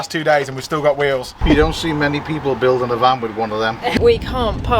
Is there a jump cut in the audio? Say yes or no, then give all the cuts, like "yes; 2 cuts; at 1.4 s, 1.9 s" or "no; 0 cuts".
yes; 2 cuts; at 1.3 s, 4.0 s